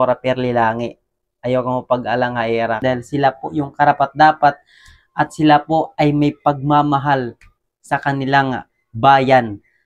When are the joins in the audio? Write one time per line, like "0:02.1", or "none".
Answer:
0:02.8